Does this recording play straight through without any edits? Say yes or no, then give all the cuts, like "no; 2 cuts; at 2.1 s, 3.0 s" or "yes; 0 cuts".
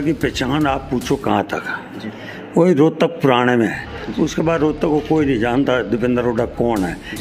yes; 0 cuts